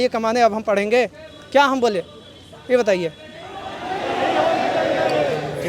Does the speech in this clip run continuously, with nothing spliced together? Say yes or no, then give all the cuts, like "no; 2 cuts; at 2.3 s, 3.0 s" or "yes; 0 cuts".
yes; 0 cuts